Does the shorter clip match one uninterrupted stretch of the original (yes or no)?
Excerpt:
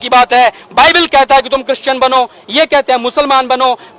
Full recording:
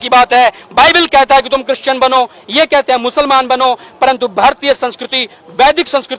yes